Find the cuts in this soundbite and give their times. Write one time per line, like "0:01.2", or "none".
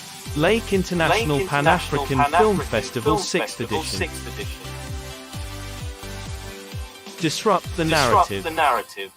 0:08.1